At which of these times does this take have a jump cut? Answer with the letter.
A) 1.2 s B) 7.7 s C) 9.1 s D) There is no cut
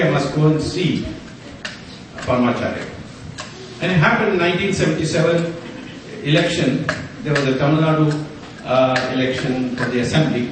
A